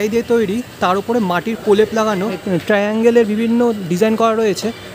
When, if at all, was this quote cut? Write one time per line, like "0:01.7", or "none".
0:02.4